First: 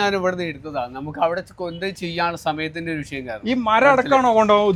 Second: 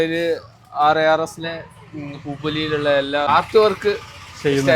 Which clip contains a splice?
second; 1 cut; at 3.3 s

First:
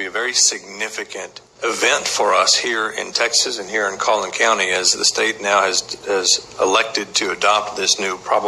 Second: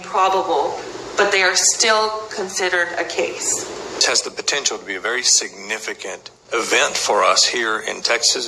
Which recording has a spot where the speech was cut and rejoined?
second; 1 cut; at 4.0 s

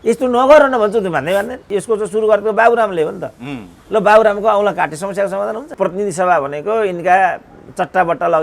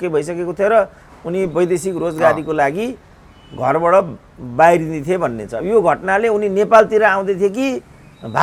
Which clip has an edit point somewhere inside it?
first; 2 cuts; at 1.6 s, 5.7 s

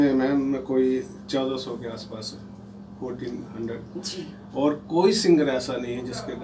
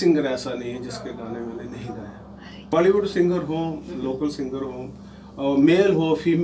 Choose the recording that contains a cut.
second; 1 cut; at 2.7 s

